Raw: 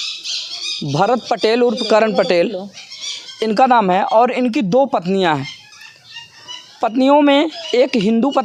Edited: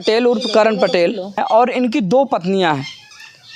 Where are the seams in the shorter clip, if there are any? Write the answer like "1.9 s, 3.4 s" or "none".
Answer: 1.4 s